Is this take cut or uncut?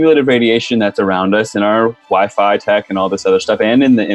uncut